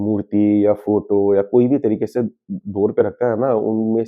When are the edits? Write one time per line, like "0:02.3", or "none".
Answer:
none